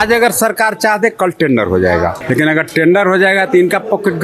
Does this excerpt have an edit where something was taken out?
yes; 1 cut; at 2.2 s

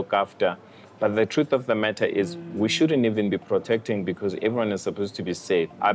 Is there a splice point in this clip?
no; 0 cuts

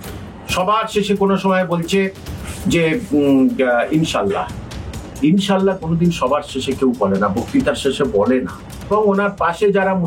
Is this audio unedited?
no; 1 cut; at 8.9 s

